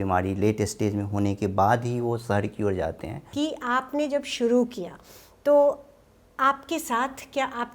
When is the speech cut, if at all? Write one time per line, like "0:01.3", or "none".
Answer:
0:03.2